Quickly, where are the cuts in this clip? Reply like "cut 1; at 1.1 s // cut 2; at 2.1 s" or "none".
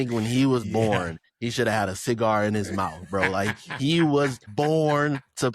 cut 1; at 4.4 s